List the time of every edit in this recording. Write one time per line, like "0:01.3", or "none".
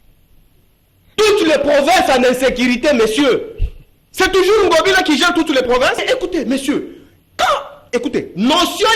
0:06.0